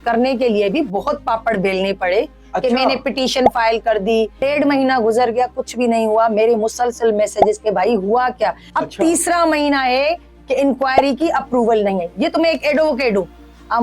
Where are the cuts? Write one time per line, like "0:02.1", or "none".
0:04.4
0:08.6